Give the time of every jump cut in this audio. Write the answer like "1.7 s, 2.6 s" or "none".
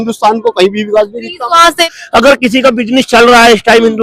2.0 s